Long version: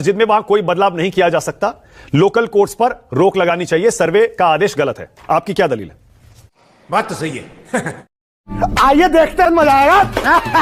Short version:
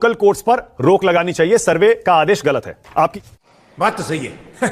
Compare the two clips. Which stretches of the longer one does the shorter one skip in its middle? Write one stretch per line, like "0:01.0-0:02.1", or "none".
0:05.5-0:06.3

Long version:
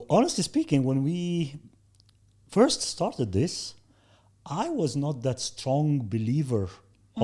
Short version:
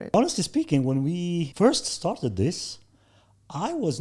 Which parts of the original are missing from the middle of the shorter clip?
0:01.5-0:02.5

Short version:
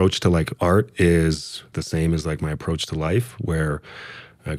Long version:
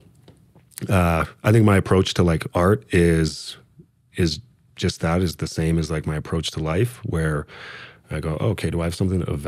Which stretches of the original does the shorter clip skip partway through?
0:03.7-0:05.4

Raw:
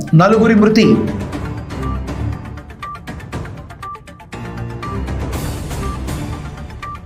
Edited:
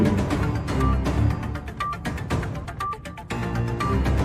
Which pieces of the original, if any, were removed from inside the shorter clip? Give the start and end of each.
none

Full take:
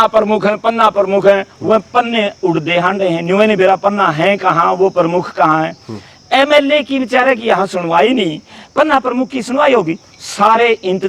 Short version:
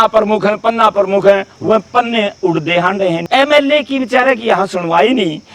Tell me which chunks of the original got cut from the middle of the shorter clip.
0:03.2-0:06.2

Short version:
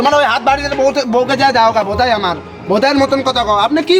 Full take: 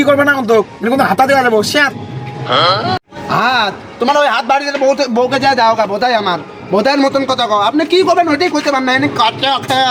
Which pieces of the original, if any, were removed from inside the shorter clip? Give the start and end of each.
none

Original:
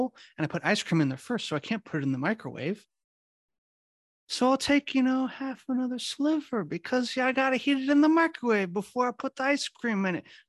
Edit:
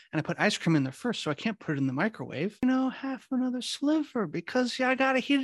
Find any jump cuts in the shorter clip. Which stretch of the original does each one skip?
0:02.9-0:05.0

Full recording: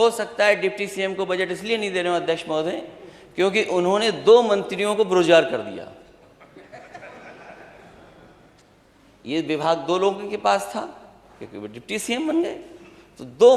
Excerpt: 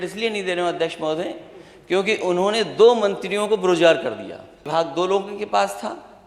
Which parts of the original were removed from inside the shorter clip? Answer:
0:06.2-0:09.6

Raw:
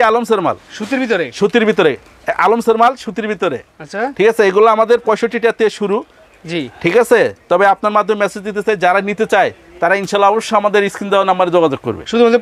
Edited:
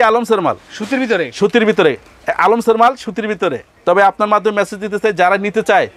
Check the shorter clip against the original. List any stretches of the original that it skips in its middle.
0:03.7-0:07.4

